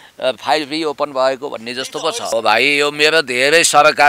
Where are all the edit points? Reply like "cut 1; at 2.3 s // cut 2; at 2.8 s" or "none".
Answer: cut 1; at 2.3 s